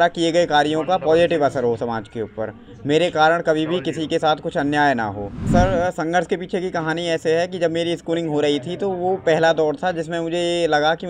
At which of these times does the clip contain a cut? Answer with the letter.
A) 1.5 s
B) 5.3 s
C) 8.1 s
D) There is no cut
B